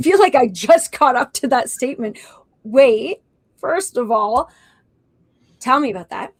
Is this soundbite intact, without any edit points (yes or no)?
yes